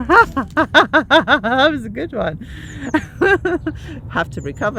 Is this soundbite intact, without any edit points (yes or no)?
yes